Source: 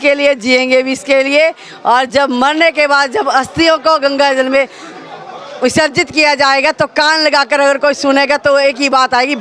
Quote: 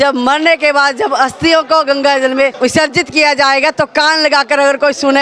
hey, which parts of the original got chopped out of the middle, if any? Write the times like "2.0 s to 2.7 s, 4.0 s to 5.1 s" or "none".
4.7 s to 5.6 s